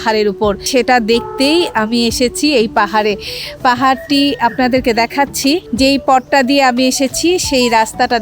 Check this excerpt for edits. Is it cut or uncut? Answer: uncut